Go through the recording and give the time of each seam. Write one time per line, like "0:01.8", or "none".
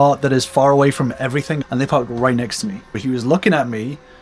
0:01.6
0:03.0

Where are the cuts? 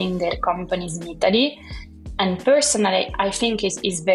none

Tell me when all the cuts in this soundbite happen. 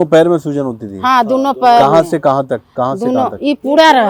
none

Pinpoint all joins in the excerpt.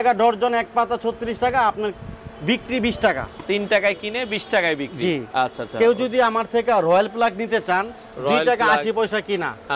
none

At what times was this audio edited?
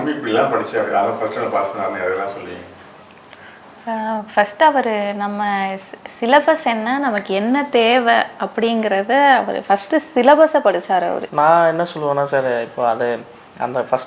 0:11.3

